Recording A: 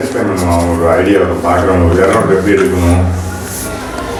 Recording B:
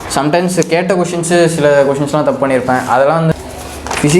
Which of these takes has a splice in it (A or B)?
B